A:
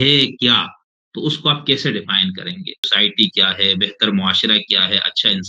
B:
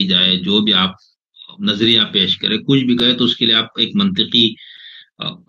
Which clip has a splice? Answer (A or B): A